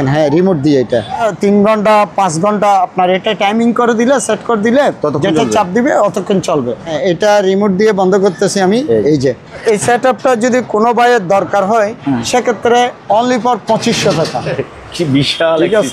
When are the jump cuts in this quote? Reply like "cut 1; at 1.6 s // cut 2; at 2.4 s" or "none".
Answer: cut 1; at 1.2 s // cut 2; at 6.9 s // cut 3; at 9.6 s // cut 4; at 14.5 s

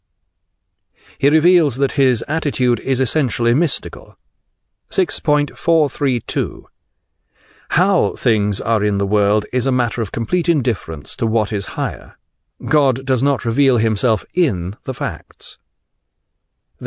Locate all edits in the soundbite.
none

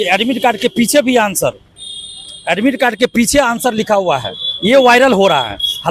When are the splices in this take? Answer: none

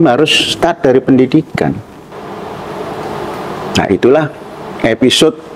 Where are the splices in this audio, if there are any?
cut 1; at 2.1 s

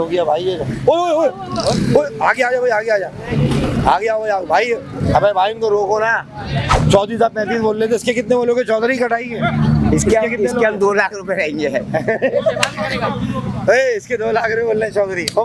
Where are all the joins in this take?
cut 1; at 6.6 s

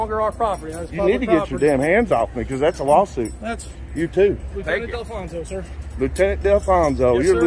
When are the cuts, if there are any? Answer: none

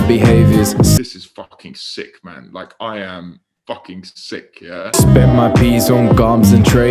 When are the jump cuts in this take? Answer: cut 1; at 1.0 s // cut 2; at 4.9 s

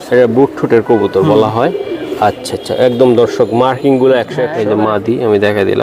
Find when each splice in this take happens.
cut 1; at 4.5 s

